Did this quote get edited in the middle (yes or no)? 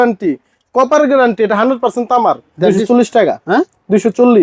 yes